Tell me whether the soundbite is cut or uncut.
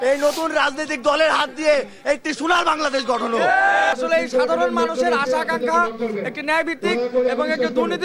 cut